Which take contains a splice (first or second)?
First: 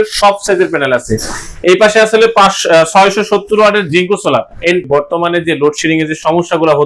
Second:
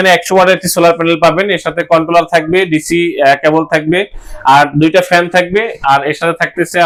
first